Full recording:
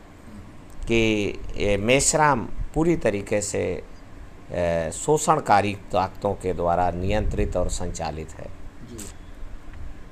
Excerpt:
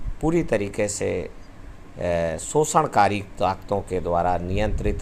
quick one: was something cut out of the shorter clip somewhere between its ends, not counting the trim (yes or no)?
no